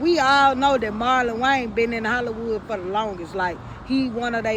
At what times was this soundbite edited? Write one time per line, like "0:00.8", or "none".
none